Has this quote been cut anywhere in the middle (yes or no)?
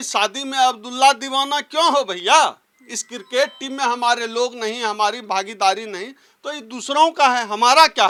no